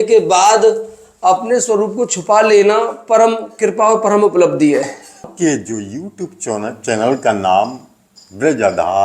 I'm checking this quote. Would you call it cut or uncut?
cut